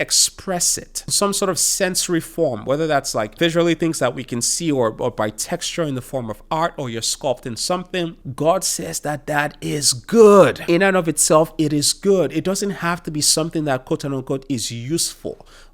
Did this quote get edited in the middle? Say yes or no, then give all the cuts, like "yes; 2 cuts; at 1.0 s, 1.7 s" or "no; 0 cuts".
yes; 4 cuts; at 1.1 s, 3.3 s, 8.2 s, 10.6 s